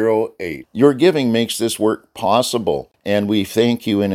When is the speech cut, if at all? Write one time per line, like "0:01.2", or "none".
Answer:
0:02.9